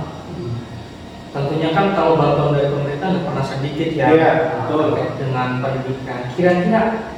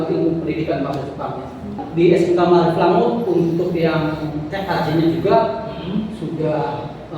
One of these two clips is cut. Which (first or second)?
second